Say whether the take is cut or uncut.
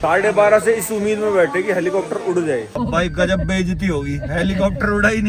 cut